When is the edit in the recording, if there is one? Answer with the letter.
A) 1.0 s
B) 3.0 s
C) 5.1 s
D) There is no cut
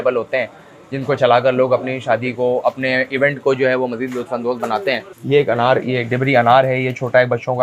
C